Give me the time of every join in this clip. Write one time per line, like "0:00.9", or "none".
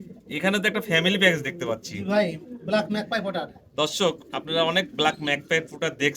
none